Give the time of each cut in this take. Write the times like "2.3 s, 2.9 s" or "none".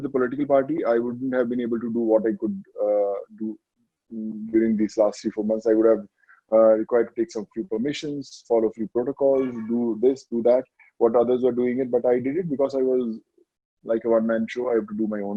none